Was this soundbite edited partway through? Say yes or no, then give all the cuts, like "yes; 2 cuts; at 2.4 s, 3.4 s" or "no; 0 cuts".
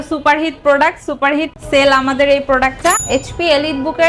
yes; 1 cut; at 3.0 s